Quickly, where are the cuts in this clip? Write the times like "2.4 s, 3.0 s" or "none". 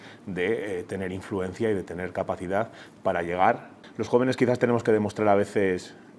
3.8 s